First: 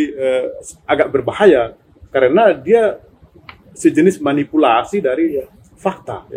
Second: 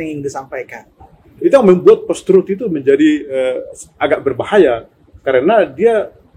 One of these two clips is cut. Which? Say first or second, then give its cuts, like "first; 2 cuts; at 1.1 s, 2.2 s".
second; 1 cut; at 1.3 s